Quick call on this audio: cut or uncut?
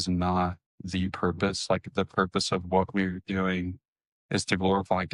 uncut